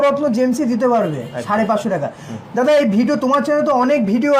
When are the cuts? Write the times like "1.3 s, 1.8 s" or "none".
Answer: none